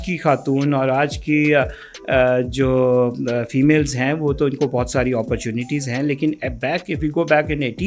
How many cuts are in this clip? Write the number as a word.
zero